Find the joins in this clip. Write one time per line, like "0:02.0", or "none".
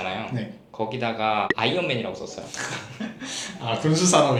none